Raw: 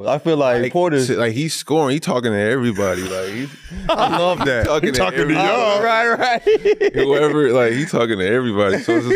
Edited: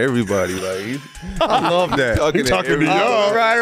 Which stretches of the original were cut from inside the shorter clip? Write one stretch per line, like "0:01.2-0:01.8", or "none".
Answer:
none